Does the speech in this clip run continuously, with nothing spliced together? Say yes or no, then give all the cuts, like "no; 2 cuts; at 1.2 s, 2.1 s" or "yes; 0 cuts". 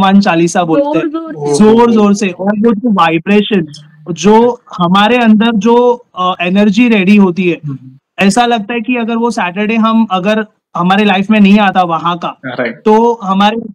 yes; 0 cuts